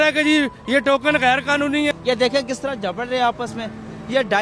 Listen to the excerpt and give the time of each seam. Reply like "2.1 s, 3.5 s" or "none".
2.0 s